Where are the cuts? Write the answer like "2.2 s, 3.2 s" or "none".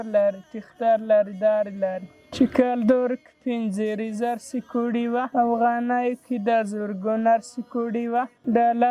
2.2 s, 5.3 s